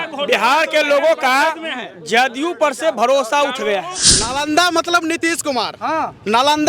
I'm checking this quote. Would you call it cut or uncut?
cut